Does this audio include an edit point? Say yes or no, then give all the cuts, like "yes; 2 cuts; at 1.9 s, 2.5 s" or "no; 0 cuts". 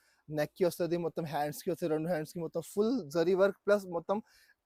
no; 0 cuts